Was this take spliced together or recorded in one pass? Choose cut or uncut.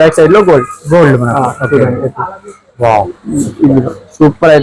uncut